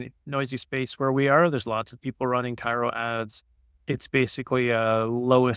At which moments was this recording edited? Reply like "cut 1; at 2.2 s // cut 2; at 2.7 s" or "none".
cut 1; at 3.7 s